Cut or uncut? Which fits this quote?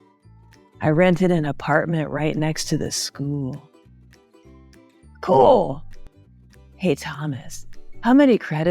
cut